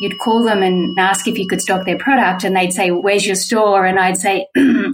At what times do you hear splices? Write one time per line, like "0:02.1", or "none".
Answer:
0:01.0
0:03.0